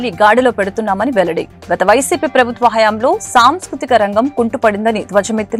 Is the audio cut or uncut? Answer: uncut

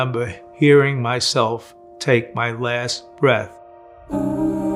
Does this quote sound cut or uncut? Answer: uncut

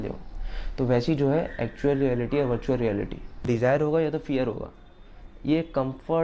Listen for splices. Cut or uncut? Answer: cut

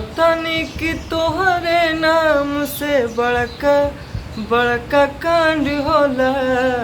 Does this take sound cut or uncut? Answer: uncut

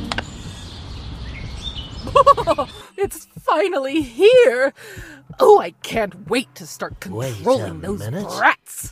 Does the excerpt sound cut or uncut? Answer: cut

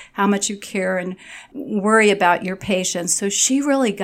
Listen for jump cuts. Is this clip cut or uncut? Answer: cut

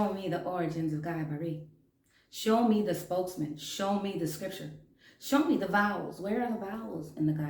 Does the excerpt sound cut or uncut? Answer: uncut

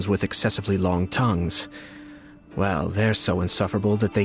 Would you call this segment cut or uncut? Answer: uncut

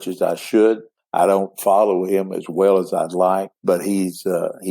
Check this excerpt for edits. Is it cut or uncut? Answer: cut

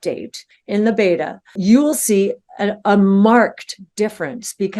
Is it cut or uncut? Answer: cut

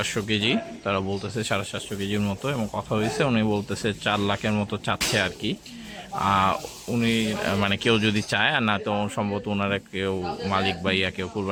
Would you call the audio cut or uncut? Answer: uncut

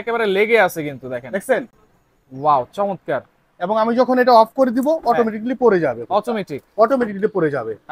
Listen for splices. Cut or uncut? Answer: uncut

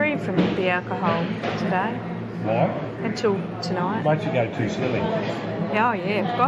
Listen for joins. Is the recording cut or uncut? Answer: uncut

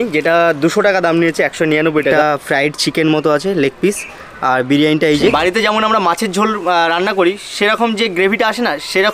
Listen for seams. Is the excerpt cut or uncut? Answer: cut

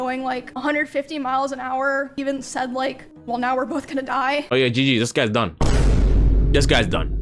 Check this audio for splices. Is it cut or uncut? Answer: cut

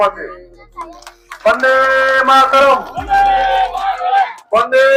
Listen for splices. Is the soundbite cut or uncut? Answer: uncut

